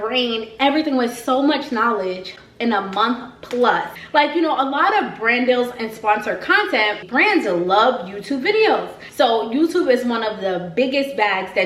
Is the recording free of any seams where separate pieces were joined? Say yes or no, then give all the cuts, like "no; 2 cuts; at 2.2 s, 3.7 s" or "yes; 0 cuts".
no; 3 cuts; at 3.9 s, 7.0 s, 9.0 s